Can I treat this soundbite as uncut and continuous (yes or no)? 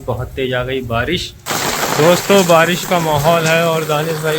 no